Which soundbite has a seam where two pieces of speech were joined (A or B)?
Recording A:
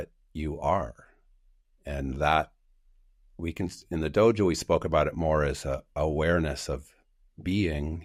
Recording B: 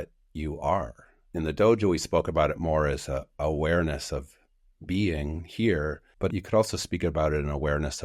B